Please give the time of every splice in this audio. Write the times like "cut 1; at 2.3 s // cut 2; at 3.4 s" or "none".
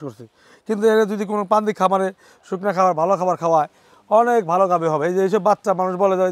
none